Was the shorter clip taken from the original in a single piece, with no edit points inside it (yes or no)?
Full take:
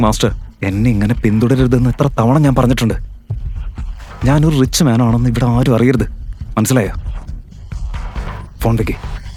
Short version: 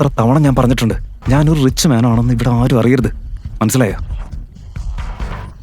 no